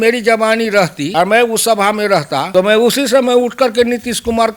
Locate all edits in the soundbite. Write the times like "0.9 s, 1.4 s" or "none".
1.0 s, 2.4 s